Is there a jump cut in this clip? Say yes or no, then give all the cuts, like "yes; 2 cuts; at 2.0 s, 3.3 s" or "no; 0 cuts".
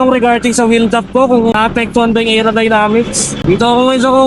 yes; 1 cut; at 1.5 s